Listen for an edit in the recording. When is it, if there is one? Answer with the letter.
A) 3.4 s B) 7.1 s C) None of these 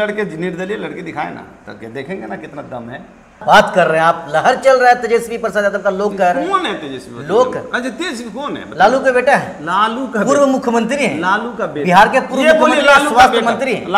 A